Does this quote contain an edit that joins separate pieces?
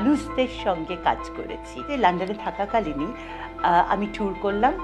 yes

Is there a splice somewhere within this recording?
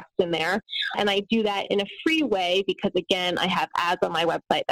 yes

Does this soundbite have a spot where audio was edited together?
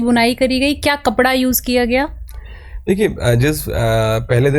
no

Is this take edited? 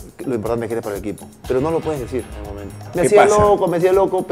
yes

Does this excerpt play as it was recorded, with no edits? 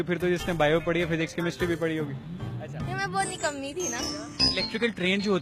no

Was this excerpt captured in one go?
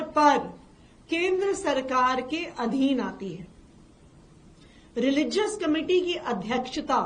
yes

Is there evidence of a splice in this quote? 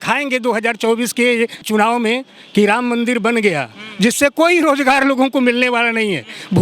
yes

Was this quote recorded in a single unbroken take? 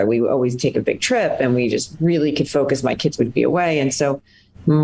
yes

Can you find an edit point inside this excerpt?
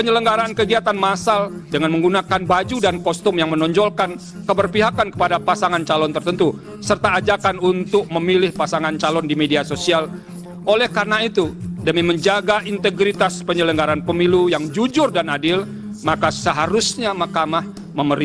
yes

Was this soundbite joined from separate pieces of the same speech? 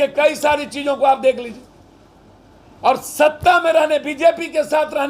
no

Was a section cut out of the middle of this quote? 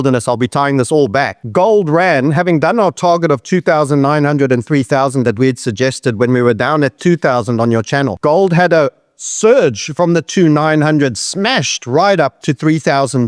yes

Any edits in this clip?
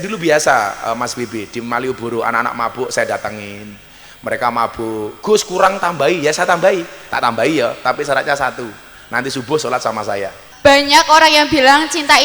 yes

